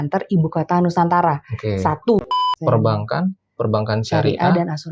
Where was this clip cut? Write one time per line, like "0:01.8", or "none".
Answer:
0:02.2